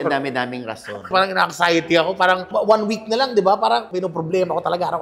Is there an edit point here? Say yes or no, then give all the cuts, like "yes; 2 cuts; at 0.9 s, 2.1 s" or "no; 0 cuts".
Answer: yes; 2 cuts; at 1.1 s, 3.9 s